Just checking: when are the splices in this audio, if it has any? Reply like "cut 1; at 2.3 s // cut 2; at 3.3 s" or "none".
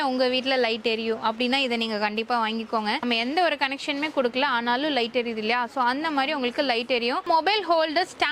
cut 1; at 3.0 s // cut 2; at 7.2 s